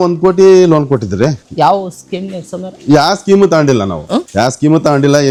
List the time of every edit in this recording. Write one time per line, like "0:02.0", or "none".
none